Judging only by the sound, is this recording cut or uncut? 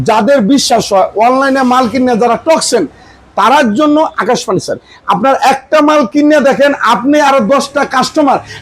uncut